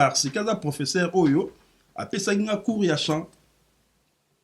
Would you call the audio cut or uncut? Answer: uncut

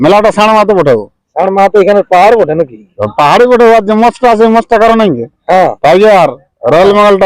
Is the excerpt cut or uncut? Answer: cut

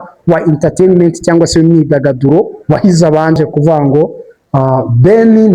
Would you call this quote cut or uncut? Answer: cut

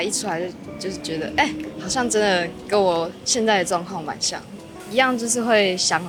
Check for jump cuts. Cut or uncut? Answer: uncut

